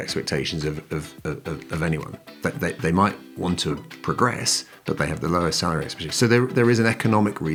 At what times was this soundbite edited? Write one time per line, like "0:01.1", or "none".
none